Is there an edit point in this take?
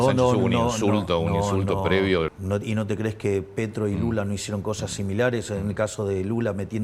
yes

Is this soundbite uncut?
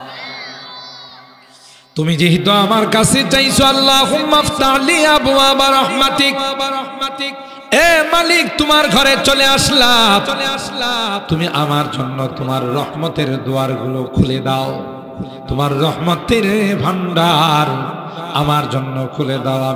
yes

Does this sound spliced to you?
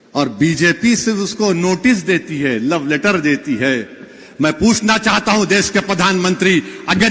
no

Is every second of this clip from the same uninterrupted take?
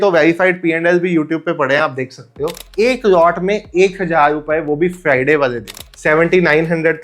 no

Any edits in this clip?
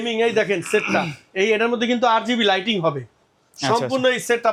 no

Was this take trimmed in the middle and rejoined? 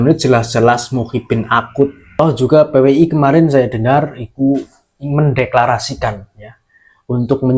yes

